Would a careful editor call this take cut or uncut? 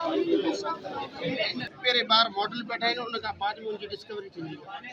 cut